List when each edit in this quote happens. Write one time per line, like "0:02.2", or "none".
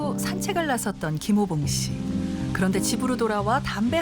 0:02.0